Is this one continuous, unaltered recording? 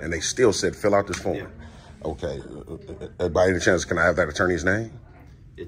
yes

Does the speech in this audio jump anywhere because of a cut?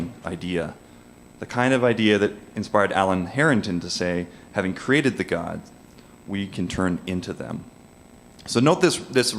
yes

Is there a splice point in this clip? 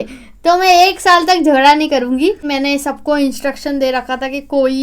yes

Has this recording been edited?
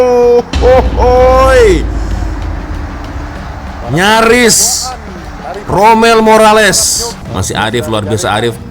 yes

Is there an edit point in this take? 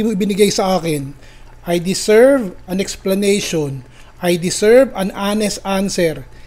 no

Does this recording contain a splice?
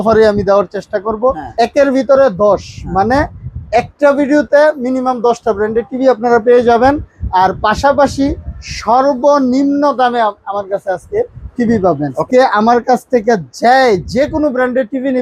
yes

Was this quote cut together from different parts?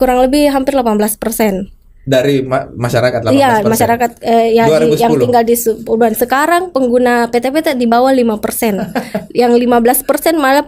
no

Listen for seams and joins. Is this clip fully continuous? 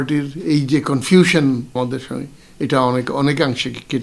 no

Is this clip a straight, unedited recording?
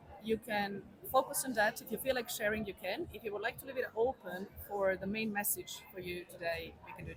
yes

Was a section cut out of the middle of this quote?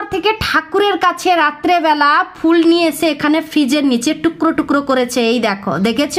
no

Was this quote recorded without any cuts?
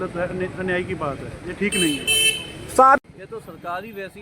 no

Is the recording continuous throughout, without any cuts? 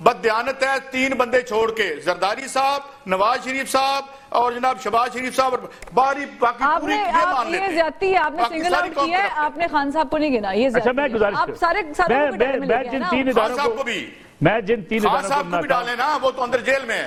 yes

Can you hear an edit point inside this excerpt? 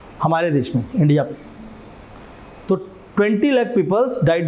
no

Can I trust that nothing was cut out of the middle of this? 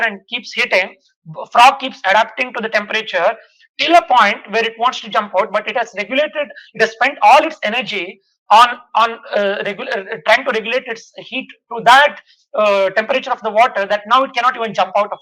yes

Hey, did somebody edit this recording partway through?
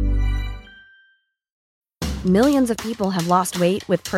yes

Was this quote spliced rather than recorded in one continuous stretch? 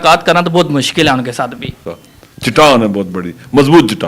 yes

